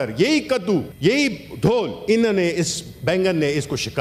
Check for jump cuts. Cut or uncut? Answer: cut